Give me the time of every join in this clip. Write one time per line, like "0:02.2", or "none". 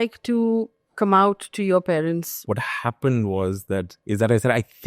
0:02.4
0:03.9